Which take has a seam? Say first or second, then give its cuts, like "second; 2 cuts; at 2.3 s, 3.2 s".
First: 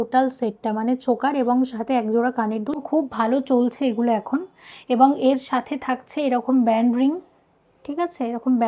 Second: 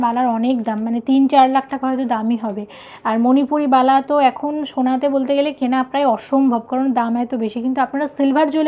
first; 1 cut; at 2.8 s